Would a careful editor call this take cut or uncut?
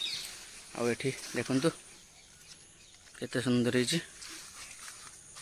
uncut